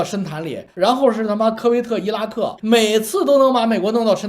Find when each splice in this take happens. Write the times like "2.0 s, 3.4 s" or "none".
2.6 s